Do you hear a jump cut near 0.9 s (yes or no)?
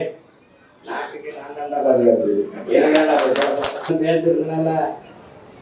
no